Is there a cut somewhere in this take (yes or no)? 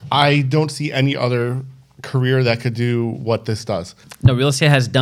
yes